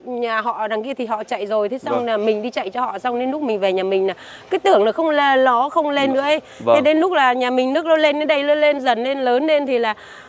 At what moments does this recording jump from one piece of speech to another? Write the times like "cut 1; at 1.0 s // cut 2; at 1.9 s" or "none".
none